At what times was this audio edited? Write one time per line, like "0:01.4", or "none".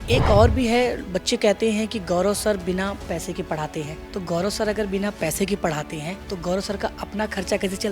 0:04.0
0:06.2